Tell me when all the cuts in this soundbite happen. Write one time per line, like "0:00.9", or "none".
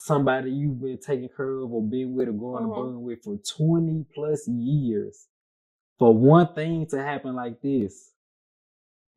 none